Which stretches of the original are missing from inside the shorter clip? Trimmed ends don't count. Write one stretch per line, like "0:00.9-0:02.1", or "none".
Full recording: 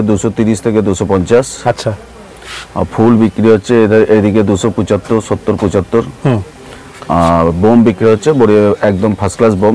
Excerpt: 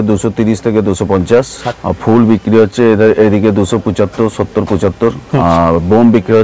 0:01.6-0:02.5
0:06.3-0:07.1